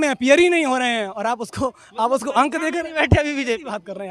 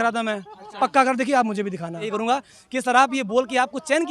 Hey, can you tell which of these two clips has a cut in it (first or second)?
second